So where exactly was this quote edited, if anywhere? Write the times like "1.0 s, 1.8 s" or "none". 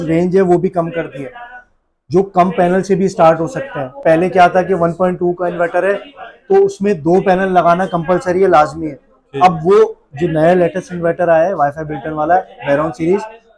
none